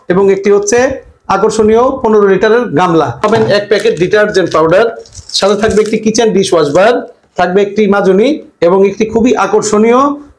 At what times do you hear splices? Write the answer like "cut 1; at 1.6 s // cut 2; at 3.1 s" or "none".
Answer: cut 1; at 3.3 s